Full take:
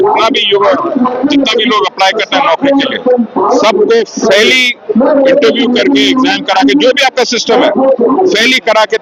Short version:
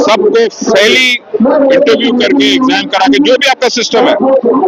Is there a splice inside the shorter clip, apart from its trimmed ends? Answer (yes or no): no